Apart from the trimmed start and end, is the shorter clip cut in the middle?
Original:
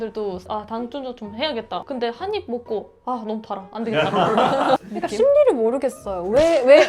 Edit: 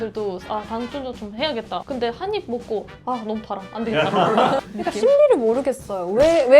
yes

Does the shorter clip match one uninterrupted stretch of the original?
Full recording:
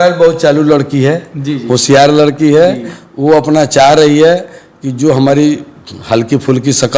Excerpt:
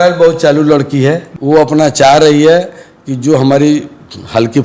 no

